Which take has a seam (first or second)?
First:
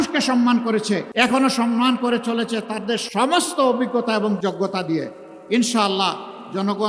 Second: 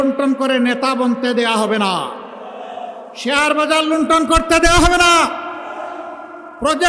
first